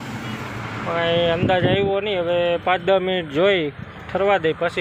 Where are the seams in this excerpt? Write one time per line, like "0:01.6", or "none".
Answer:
none